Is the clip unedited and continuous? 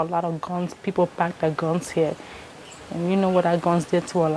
yes; 0 cuts

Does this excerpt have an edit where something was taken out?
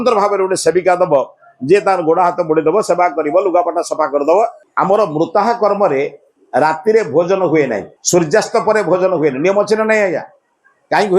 yes; 1 cut; at 4.6 s

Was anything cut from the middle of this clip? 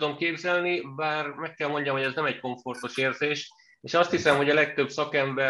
no; 0 cuts

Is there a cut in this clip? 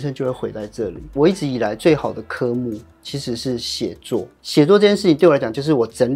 no; 0 cuts

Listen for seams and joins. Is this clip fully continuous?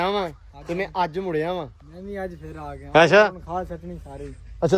yes; 0 cuts

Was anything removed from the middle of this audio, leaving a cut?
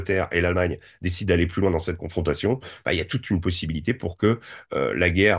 no; 0 cuts

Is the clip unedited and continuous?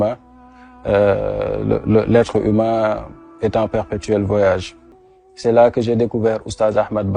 no; 1 cut; at 5.0 s

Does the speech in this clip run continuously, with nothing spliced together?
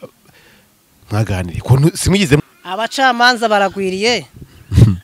no; 1 cut; at 2.4 s

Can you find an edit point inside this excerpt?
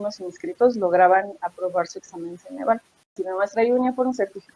yes; 1 cut; at 3.1 s

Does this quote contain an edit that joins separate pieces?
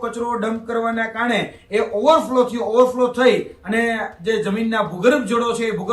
no; 0 cuts

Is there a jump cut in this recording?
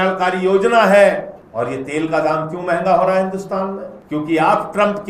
yes; 2 cuts; at 1.4 s, 3.9 s

